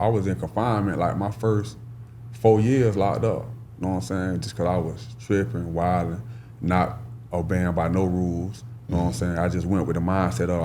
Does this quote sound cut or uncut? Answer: uncut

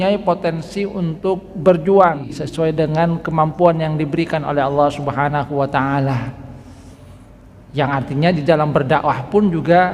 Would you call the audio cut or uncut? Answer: cut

